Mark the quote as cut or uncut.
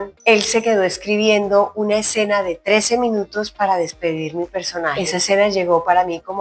cut